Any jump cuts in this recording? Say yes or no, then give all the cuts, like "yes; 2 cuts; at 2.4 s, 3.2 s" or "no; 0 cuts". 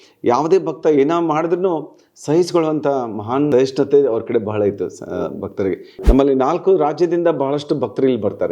yes; 2 cuts; at 3.5 s, 5.9 s